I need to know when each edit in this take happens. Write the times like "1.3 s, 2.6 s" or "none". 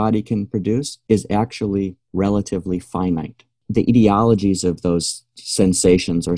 2.0 s, 3.6 s